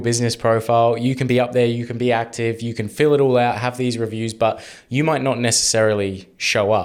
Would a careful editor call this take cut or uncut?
uncut